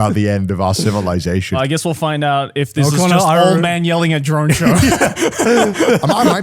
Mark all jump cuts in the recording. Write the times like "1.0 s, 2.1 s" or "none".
1.6 s